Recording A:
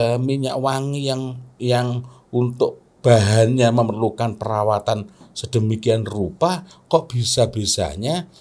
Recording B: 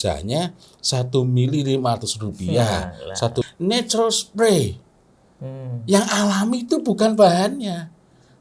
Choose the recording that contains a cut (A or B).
B